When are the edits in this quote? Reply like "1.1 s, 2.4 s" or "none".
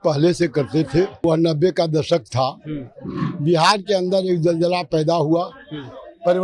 1.2 s